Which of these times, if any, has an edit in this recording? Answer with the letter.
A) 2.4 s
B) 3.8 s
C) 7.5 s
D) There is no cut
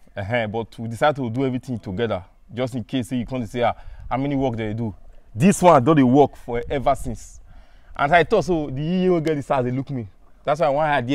D